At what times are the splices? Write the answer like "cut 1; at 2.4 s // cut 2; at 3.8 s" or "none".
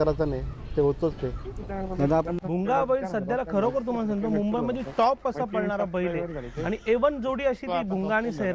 cut 1; at 2.4 s

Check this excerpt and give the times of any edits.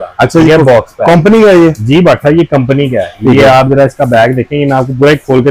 none

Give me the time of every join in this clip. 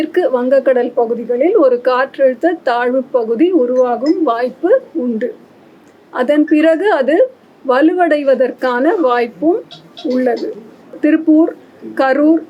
cut 1; at 11.0 s

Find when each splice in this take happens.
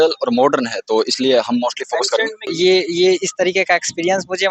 cut 1; at 2.5 s

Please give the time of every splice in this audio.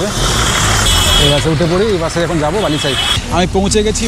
cut 1; at 0.9 s // cut 2; at 3.2 s

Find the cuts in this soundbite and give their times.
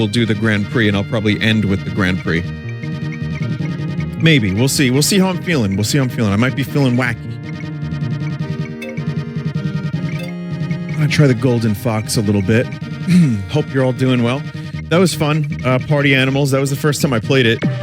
cut 1; at 1.6 s

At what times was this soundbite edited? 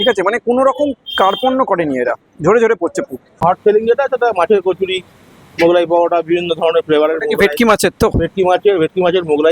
cut 1; at 3.3 s

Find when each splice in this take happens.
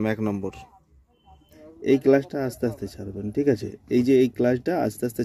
cut 1; at 1.6 s

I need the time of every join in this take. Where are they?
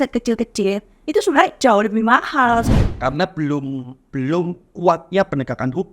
cut 1; at 2.7 s

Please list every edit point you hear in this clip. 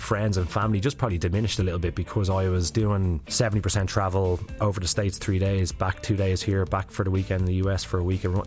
cut 1; at 3.2 s // cut 2; at 4.5 s

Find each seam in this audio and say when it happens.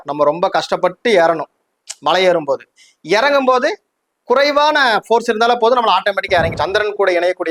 cut 1; at 6.5 s

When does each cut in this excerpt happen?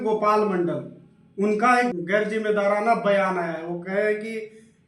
cut 1; at 1.9 s

